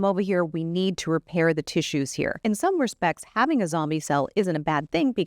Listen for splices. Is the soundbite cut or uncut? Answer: cut